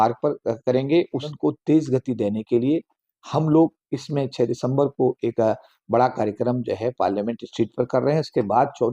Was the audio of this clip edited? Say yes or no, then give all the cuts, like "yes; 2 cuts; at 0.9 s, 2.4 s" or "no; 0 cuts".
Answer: yes; 1 cut; at 1.3 s